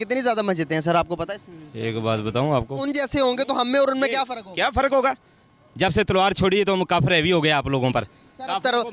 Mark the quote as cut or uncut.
cut